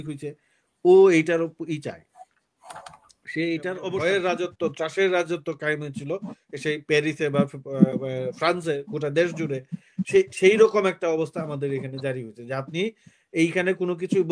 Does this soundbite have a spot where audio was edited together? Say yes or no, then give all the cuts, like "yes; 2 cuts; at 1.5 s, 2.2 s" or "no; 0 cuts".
yes; 1 cut; at 4.0 s